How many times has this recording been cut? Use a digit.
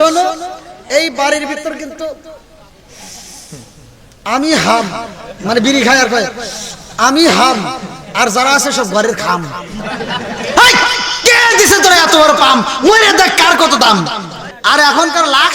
1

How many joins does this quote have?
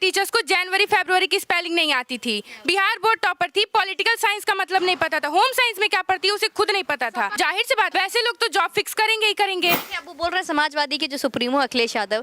2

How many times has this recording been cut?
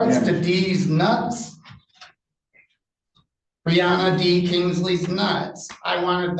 0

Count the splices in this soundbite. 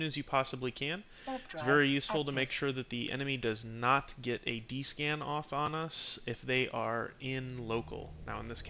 0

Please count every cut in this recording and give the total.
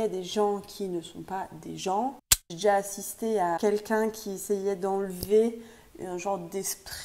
1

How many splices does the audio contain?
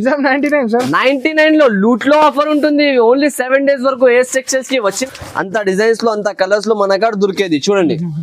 1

